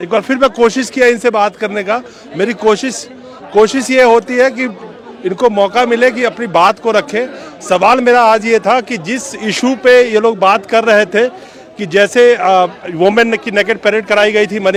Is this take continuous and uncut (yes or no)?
yes